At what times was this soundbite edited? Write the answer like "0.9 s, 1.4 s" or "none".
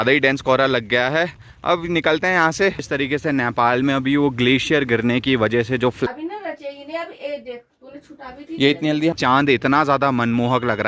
2.8 s, 6.1 s, 9.1 s